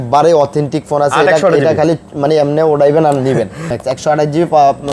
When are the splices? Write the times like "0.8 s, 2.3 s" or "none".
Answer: 3.8 s